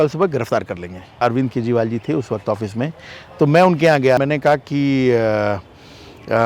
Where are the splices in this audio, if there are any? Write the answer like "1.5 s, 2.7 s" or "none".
1.2 s, 4.2 s